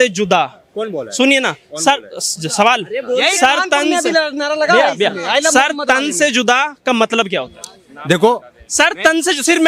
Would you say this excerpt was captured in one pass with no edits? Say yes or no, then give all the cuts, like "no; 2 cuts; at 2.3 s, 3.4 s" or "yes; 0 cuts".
yes; 0 cuts